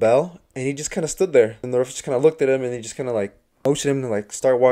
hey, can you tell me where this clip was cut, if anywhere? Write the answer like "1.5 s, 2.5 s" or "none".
1.6 s, 3.6 s

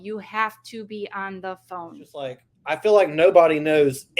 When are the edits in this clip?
2.5 s

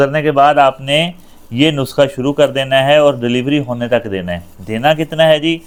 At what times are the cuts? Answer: none

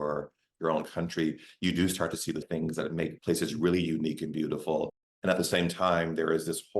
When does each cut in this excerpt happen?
2.5 s

